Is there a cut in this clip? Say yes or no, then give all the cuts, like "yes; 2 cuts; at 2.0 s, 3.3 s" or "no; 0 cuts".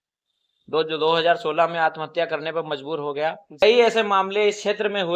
yes; 1 cut; at 3.6 s